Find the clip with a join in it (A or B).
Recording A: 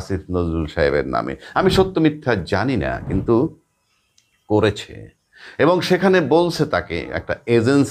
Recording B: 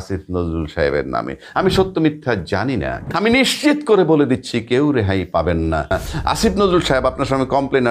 B